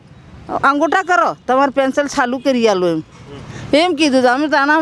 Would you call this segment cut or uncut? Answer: uncut